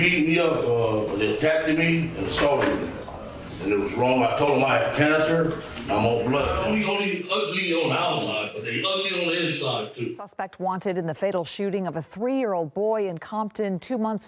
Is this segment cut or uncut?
cut